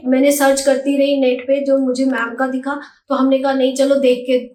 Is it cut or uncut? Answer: uncut